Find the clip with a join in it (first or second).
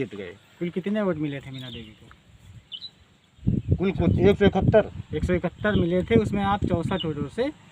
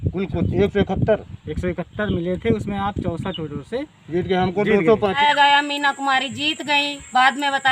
second